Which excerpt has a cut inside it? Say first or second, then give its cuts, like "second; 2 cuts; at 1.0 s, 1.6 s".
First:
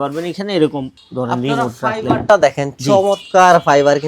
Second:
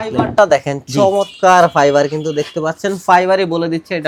first; 1 cut; at 1.0 s